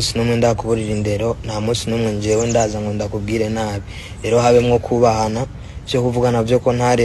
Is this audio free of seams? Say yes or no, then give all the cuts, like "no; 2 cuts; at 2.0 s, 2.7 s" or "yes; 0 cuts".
yes; 0 cuts